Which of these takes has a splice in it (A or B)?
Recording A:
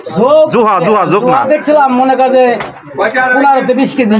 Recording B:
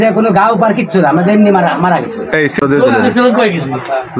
B